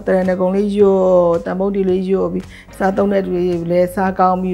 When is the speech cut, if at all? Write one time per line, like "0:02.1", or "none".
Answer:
none